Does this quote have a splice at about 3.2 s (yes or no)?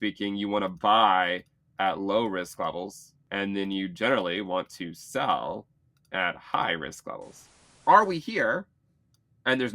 yes